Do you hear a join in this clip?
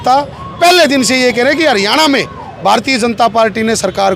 no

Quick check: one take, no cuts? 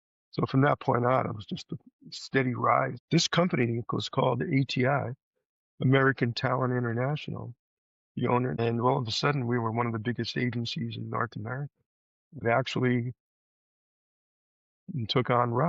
no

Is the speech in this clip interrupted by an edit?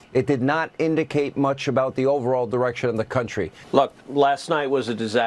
yes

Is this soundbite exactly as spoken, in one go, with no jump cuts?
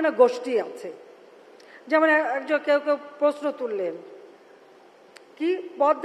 yes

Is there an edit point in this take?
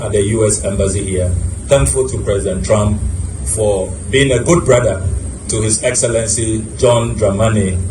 no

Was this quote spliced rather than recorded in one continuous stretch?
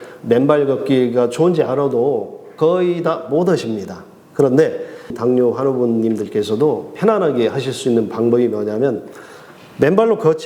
yes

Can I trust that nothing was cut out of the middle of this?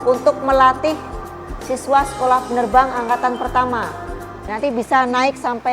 no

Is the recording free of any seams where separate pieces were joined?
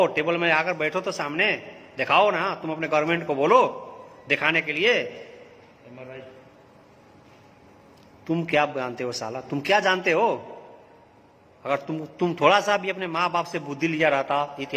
no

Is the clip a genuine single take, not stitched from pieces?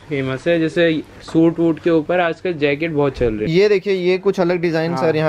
no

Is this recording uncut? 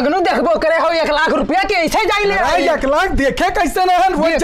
yes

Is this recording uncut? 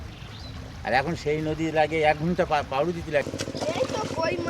no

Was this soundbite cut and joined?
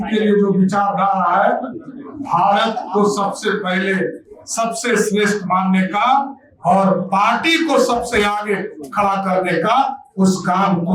no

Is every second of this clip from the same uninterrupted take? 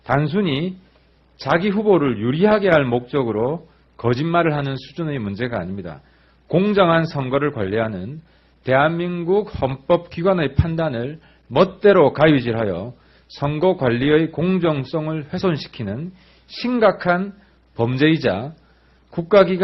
yes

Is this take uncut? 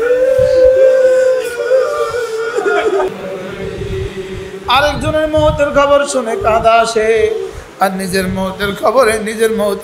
no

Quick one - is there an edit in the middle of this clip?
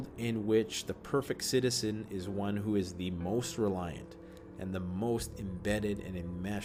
no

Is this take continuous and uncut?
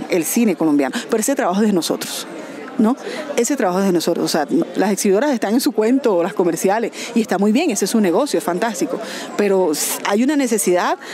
yes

